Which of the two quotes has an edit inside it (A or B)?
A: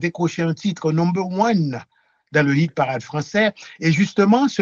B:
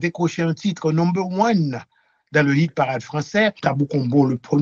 B